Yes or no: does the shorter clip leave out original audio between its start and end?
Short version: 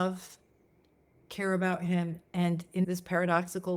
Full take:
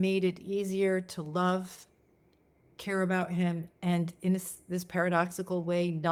yes